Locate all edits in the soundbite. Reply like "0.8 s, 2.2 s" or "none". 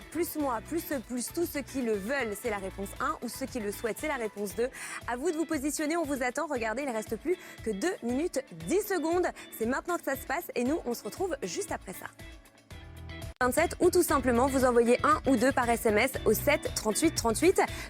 2.1 s